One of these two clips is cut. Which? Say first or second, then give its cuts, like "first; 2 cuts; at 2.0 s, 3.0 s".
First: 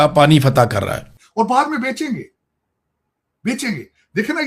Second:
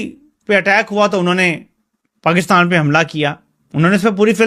first; 1 cut; at 1.2 s